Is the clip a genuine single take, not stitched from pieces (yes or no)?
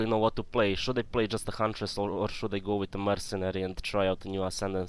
yes